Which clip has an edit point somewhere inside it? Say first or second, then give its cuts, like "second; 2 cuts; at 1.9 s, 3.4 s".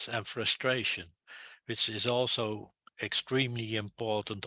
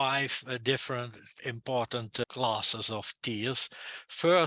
second; 2 cuts; at 1.3 s, 2.3 s